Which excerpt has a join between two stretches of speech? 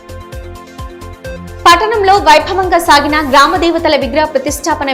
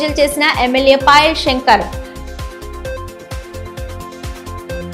first; 1 cut; at 1.0 s

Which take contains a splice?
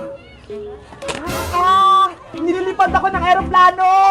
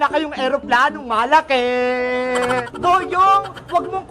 second; 1 cut; at 2.7 s

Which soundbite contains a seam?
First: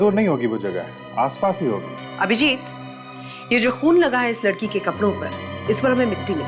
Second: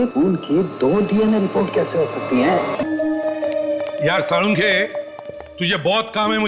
second; 1 cut; at 2.8 s

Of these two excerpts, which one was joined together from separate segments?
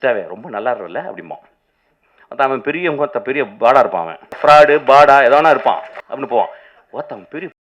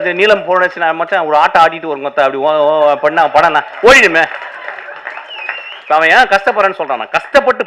first; 2 cuts; at 4.2 s, 5.9 s

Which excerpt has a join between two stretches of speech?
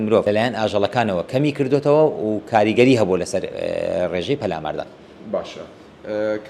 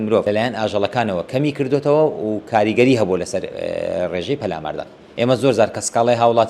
second; 1 cut; at 5.0 s

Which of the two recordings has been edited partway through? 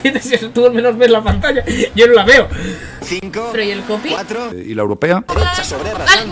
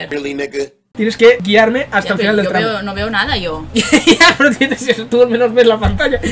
first; 1 cut; at 5.3 s

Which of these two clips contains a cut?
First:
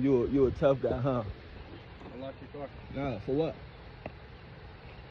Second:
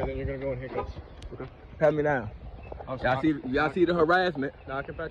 first; 1 cut; at 1.6 s

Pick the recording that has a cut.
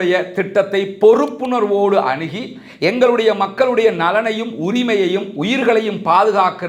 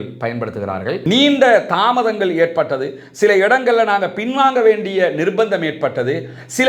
second; 1 cut; at 1.0 s

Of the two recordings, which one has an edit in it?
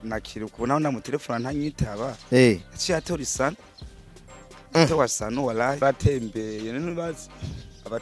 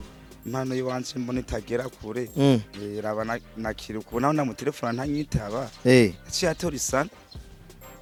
first; 1 cut; at 5.8 s

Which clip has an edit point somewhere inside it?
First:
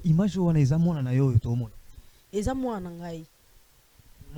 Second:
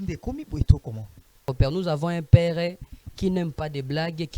second; 1 cut; at 1.4 s

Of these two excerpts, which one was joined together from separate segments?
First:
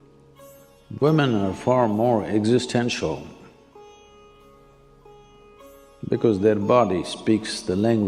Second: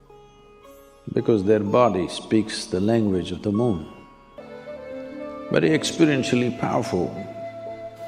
second; 1 cut; at 4.4 s

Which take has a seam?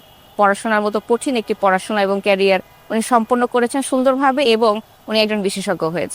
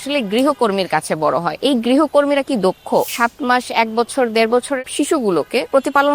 second; 3 cuts; at 1.5 s, 3.1 s, 5.2 s

